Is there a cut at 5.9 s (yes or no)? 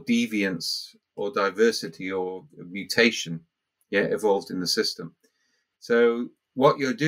no